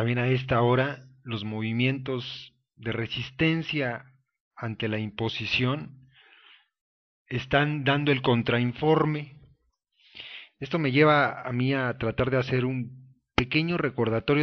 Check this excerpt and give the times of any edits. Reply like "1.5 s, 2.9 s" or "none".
8.9 s